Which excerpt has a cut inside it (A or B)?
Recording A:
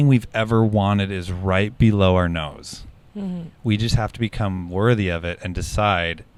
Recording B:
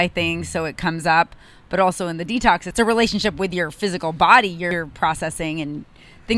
B